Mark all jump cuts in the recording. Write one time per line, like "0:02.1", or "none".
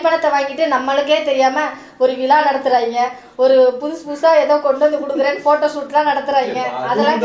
none